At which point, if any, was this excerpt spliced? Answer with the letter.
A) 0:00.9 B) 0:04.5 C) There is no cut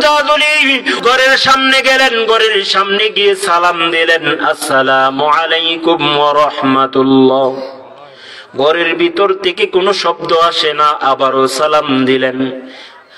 A